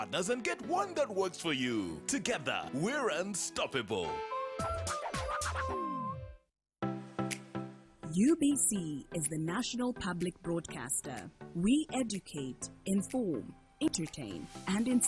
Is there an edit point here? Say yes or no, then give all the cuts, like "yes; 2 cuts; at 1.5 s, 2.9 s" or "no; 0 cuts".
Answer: yes; 1 cut; at 6.3 s